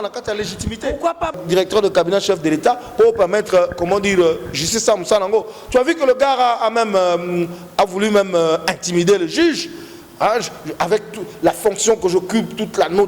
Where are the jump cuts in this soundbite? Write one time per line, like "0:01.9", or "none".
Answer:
0:01.4